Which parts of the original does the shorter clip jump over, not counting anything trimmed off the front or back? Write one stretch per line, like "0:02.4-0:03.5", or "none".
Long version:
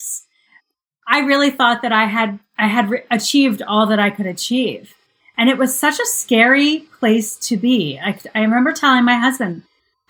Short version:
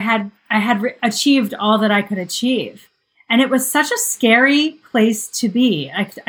none